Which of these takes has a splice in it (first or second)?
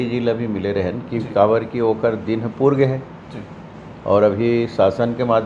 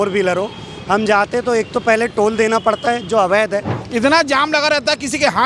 second